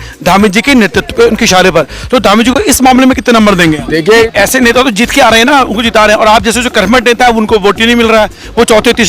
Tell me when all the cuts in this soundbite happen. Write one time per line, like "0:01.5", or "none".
0:04.2

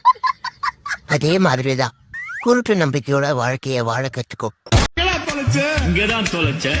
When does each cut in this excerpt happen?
0:04.9

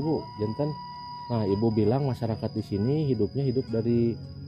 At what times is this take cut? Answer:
none

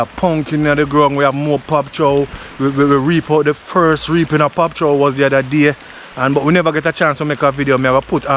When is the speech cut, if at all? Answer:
none

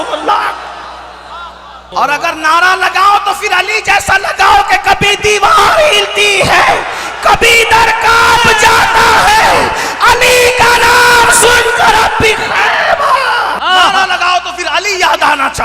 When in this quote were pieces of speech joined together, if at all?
0:01.8
0:13.6

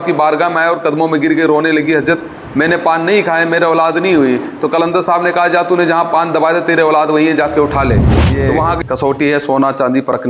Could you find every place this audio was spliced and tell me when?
0:08.4

